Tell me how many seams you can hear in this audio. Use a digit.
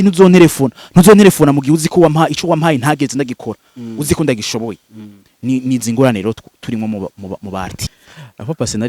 1